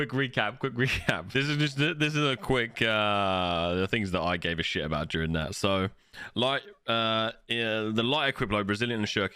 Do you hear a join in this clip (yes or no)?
yes